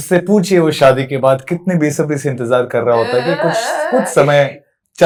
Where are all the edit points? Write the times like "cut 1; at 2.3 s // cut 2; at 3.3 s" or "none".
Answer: none